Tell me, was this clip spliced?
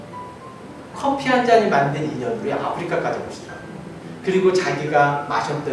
no; 0 cuts

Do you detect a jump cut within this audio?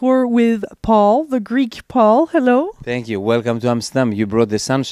yes; 1 cut; at 1.8 s

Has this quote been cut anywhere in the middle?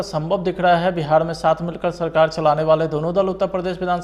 no; 0 cuts

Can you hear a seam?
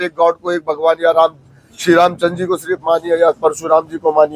no; 0 cuts

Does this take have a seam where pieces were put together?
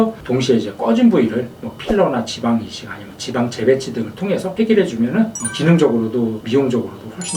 no; 0 cuts

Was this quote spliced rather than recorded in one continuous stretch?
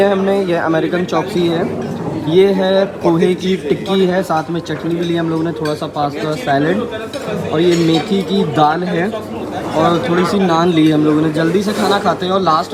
no; 0 cuts

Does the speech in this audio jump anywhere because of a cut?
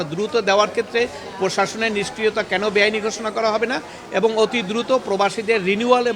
no; 0 cuts

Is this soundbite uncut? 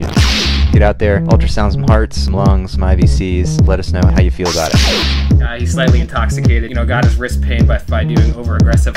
yes; 0 cuts

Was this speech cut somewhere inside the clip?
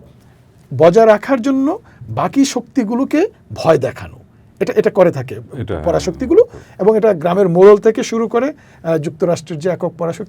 no; 0 cuts

